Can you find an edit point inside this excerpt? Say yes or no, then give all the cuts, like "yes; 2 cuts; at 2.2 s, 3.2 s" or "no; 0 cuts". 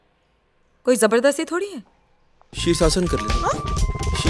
yes; 1 cut; at 2.5 s